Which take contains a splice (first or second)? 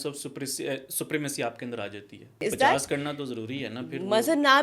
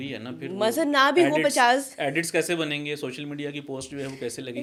first